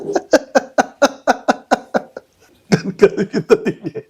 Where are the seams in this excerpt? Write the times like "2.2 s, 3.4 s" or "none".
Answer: 2.5 s

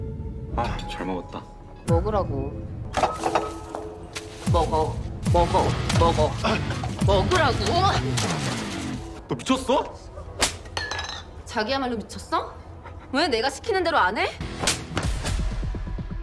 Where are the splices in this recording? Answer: 14.4 s

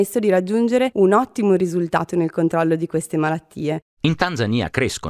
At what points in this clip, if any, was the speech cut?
0.9 s, 3.9 s

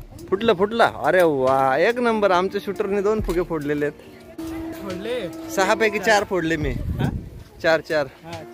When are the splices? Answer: 4.4 s

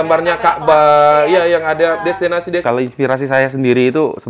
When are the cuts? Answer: 2.6 s

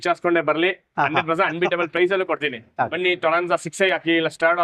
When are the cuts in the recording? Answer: 2.9 s

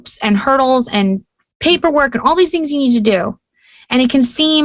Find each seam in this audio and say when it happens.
none

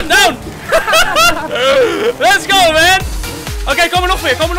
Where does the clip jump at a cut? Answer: none

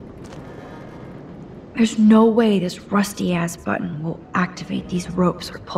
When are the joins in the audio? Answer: 1.7 s

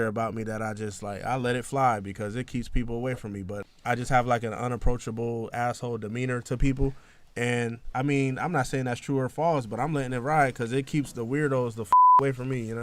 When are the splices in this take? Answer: 3.6 s

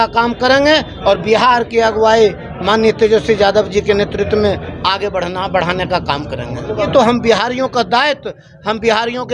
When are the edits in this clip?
6.9 s

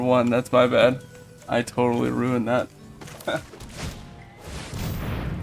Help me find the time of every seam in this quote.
3.5 s

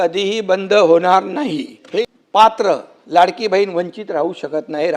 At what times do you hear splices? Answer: 1.8 s

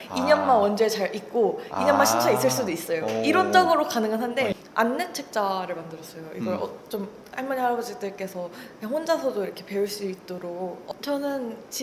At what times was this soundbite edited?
4.6 s, 10.8 s

